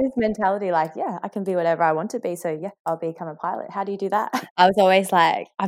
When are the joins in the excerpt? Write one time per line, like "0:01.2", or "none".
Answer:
0:02.7
0:04.3